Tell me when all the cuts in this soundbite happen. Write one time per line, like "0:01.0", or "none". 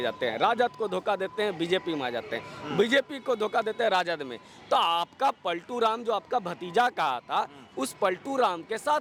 none